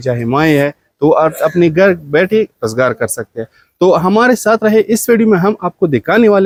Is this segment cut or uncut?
uncut